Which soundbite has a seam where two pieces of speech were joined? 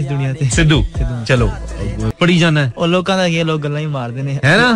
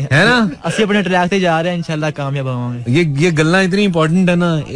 first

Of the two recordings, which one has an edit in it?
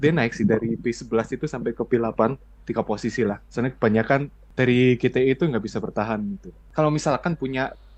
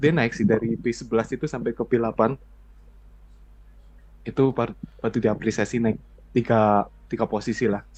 first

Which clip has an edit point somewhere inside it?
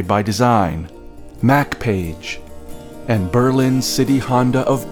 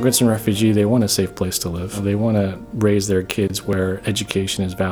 second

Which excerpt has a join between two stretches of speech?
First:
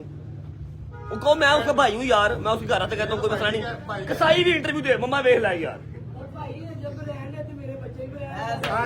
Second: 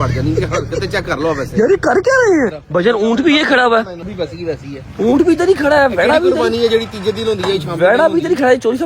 second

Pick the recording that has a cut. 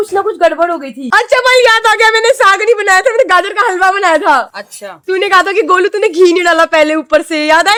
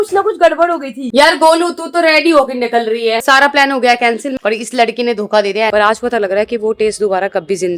second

